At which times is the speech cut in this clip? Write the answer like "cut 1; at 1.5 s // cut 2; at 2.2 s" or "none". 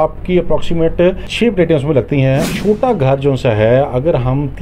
cut 1; at 1.3 s // cut 2; at 2.5 s